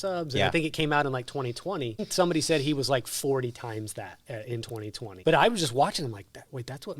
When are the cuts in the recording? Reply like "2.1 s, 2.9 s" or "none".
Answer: 2.1 s, 5.1 s